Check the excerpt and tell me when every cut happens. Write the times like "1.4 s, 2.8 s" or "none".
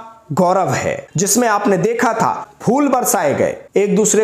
1.0 s, 2.5 s